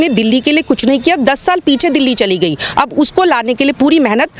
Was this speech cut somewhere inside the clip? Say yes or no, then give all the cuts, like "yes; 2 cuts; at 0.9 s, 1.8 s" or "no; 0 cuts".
no; 0 cuts